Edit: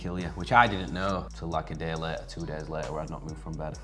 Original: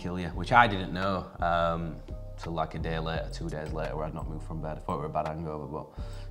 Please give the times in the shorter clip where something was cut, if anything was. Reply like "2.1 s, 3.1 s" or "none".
1.3 s